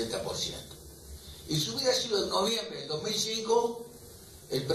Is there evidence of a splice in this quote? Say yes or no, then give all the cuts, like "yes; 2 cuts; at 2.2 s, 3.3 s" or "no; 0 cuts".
no; 0 cuts